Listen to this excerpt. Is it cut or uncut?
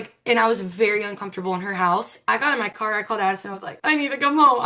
cut